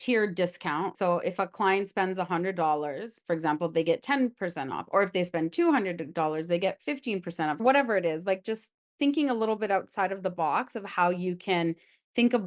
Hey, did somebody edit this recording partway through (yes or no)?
yes